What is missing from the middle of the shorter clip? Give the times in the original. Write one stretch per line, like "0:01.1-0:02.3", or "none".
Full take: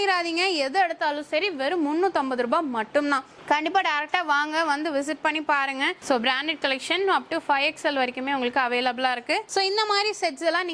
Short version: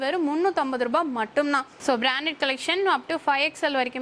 0:03.3-0:06.0